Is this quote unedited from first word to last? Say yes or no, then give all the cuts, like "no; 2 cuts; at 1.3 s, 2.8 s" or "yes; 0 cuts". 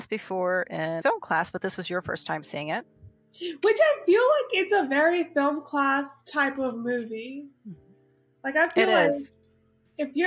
no; 1 cut; at 1.0 s